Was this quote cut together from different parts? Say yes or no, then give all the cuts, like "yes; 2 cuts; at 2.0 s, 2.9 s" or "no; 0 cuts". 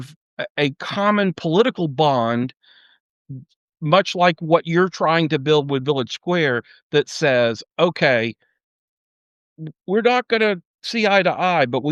no; 0 cuts